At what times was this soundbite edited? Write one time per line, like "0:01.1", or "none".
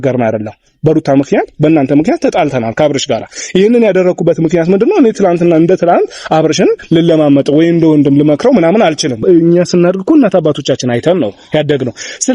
0:09.2